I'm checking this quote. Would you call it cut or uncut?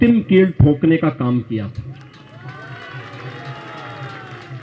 uncut